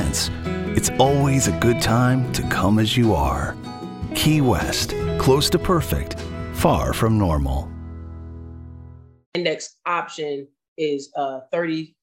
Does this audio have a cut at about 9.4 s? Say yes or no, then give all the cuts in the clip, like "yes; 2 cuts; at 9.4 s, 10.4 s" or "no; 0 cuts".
yes; 1 cut; at 9.4 s